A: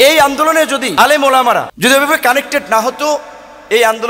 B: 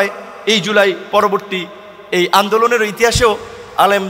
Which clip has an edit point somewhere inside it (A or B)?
A